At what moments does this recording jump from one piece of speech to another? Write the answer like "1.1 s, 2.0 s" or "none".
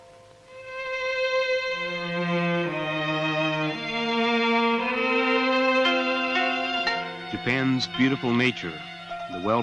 6.6 s